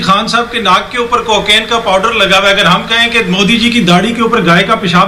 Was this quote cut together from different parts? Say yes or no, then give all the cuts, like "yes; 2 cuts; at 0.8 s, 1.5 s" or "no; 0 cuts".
no; 0 cuts